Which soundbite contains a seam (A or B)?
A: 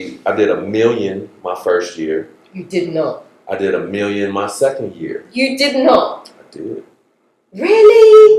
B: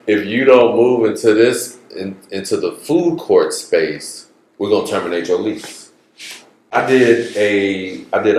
B